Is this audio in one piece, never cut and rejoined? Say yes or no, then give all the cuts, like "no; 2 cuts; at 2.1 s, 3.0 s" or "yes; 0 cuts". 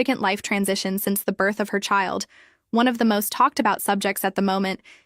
no; 1 cut; at 1.8 s